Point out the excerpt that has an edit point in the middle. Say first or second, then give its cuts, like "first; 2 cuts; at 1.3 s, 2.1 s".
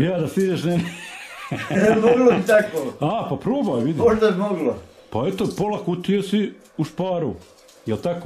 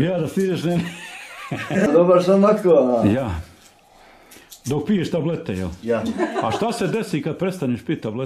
second; 1 cut; at 1.9 s